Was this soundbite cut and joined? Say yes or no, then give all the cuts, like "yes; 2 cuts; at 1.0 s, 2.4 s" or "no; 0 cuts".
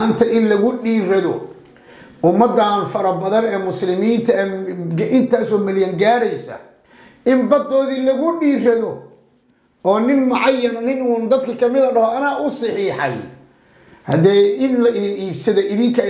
no; 0 cuts